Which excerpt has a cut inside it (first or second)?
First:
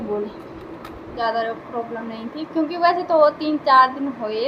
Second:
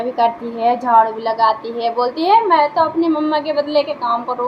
first